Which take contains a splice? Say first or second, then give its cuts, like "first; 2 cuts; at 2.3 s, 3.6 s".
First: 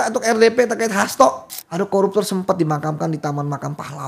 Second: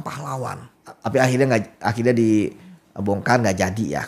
first; 1 cut; at 1.5 s